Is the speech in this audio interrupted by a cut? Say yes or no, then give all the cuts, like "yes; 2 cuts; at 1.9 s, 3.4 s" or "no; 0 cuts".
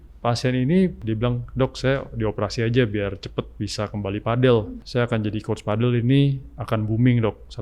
yes; 2 cuts; at 1.0 s, 4.8 s